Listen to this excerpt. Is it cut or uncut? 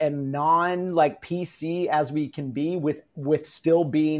uncut